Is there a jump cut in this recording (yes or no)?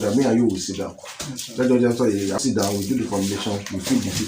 yes